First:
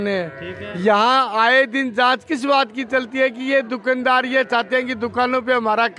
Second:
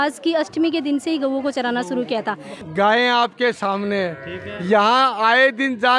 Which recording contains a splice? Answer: second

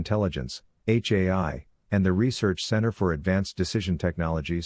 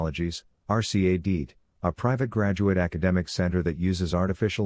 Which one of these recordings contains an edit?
first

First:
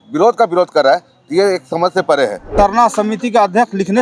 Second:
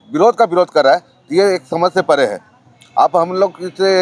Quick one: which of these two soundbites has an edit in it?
first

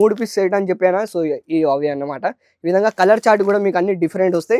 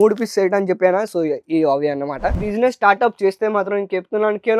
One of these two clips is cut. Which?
second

